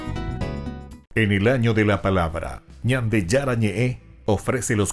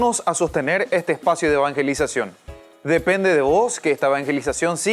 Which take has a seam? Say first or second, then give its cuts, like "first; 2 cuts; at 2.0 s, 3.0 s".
first; 1 cut; at 0.9 s